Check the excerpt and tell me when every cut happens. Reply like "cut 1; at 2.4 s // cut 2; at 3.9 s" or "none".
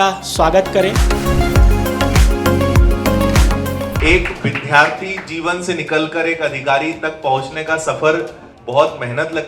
cut 1; at 3.9 s // cut 2; at 8.6 s